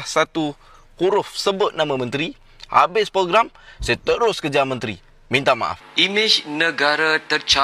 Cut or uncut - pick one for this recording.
cut